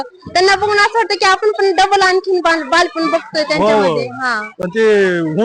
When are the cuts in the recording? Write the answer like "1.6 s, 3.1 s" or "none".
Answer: none